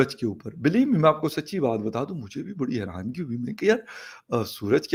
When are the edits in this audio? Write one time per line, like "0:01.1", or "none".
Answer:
none